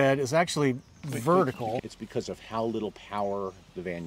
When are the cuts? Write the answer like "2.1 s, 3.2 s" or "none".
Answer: 1.8 s